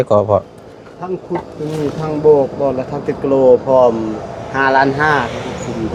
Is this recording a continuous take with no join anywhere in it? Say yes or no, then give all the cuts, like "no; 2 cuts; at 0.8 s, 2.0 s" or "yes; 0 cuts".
yes; 0 cuts